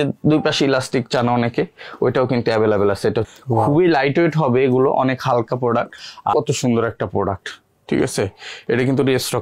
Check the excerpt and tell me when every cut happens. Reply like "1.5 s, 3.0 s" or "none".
3.2 s, 6.3 s